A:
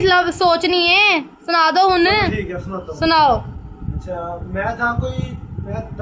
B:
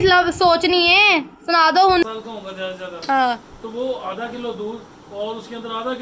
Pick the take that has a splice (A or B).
B